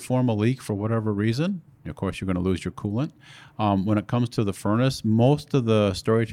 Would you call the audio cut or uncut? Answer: uncut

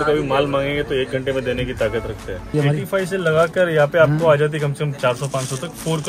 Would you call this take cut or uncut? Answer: cut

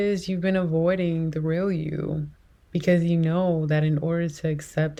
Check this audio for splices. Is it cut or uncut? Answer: uncut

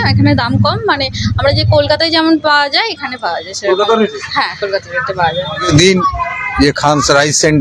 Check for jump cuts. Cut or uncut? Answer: cut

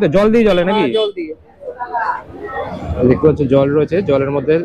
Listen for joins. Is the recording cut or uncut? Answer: uncut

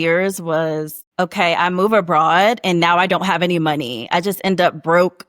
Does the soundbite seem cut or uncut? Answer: cut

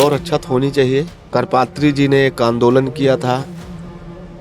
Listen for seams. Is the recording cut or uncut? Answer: cut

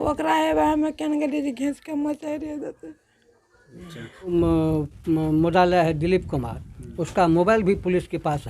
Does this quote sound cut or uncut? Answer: cut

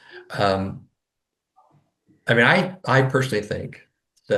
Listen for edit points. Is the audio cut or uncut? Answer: uncut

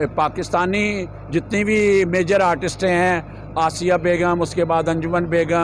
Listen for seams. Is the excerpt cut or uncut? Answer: uncut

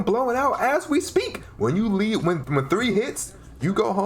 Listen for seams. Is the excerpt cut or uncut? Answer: cut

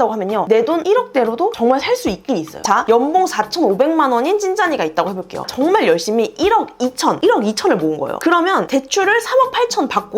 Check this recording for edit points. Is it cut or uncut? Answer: cut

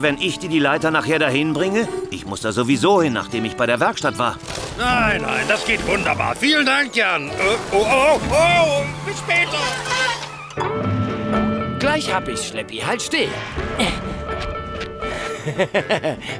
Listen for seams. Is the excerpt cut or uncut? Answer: cut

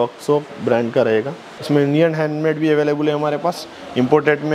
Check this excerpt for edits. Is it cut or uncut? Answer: cut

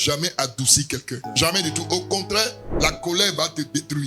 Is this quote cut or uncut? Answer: cut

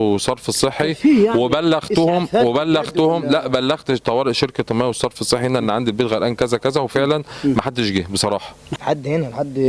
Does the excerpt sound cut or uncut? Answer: cut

